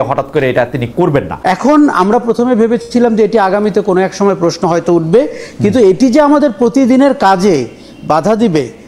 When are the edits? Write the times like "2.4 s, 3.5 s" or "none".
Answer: 1.3 s